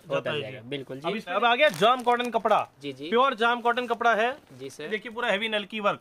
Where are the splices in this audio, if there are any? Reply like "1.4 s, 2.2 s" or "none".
1.4 s, 4.9 s